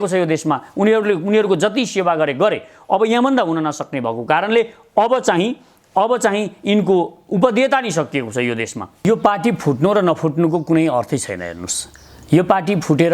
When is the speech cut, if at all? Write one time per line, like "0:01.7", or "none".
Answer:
0:09.0